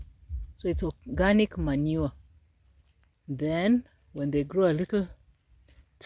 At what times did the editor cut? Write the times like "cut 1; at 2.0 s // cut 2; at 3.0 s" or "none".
none